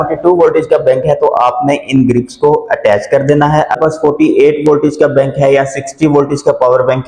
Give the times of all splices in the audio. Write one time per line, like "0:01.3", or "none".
0:03.8